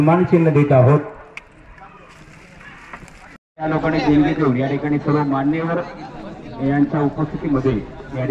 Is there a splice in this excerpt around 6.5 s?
no; 1 cut; at 3.5 s

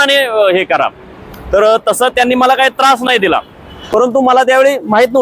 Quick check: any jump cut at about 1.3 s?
no; 1 cut; at 3.7 s

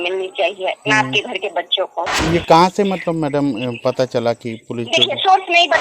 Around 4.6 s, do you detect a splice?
no; 1 cut; at 2.2 s

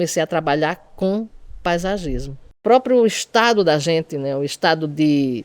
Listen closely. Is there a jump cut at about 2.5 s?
yes; 1 cut; at 2.5 s

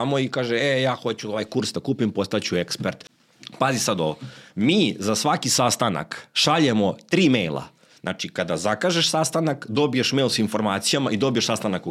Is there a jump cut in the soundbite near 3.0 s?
yes; 1 cut; at 3.0 s

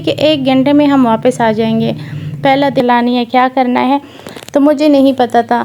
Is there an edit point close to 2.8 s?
yes; 1 cut; at 2.8 s

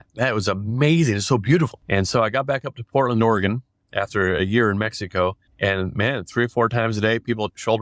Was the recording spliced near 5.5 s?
yes; 2 cuts; at 1.8 s, 5.5 s

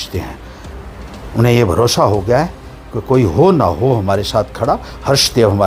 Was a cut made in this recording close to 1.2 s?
no; 0 cuts

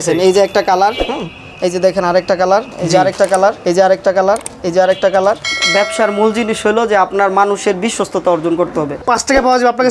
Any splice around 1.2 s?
no; 4 cuts; at 2.7 s, 3.6 s, 5.5 s, 9.0 s

